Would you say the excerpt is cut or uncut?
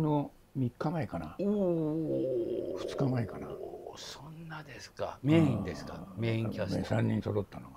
uncut